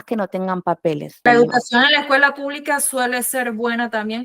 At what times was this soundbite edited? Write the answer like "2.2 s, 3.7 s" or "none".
1.3 s